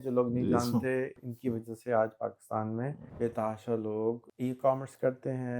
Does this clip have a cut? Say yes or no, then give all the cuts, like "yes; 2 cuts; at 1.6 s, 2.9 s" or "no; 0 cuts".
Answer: yes; 3 cuts; at 1.2 s, 3.0 s, 4.3 s